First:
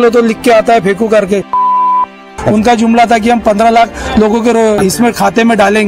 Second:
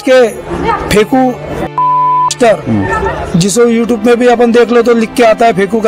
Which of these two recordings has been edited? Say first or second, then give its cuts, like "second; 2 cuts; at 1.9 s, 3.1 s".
first; 1 cut; at 4.8 s